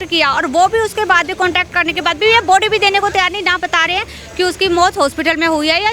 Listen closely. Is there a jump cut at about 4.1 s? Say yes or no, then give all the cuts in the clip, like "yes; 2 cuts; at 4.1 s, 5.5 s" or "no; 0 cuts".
no; 0 cuts